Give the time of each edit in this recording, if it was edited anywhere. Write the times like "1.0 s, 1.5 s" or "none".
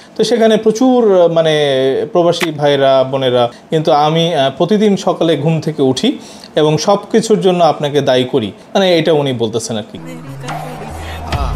3.6 s, 8.6 s

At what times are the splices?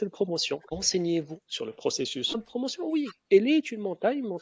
0.8 s, 2.4 s

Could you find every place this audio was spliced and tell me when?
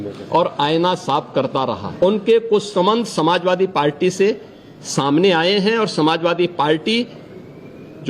1.8 s

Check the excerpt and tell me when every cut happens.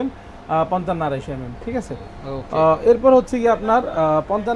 none

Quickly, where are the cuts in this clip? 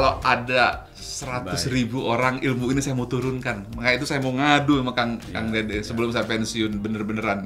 none

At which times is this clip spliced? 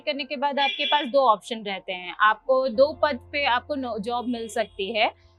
none

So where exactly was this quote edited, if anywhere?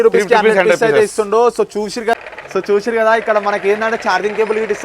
2.1 s

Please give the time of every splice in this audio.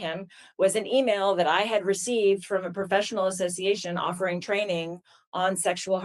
none

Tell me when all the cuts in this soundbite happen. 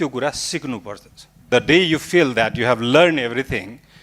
1.5 s

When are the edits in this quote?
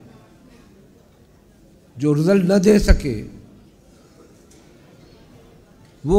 none

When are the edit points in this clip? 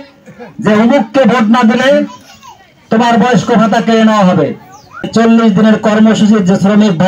5.1 s

